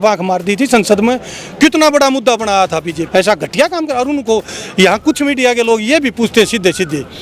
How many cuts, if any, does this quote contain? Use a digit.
1